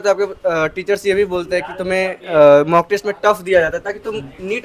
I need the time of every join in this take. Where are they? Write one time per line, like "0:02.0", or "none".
none